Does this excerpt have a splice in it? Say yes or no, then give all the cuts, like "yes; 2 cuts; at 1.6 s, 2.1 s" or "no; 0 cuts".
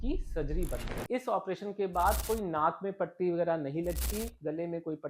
yes; 1 cut; at 1.0 s